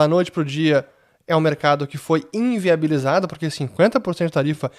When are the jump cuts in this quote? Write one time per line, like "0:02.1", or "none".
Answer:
none